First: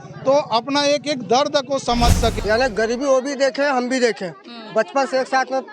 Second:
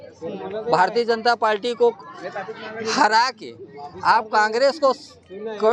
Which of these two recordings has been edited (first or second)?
first